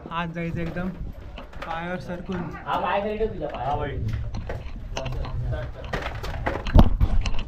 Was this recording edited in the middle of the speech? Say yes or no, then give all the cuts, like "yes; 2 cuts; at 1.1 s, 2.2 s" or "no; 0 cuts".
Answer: no; 0 cuts